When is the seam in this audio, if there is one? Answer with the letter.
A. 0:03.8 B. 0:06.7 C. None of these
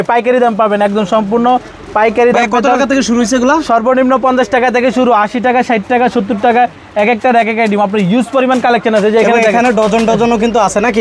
C